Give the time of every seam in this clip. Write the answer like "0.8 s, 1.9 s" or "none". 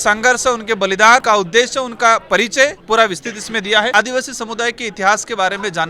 1.2 s, 2.8 s, 3.9 s